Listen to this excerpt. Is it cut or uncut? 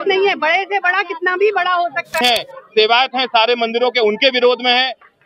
cut